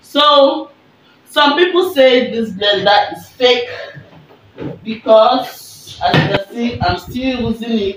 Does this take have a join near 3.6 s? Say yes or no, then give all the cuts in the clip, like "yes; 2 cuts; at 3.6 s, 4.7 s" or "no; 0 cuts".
no; 1 cut; at 6.3 s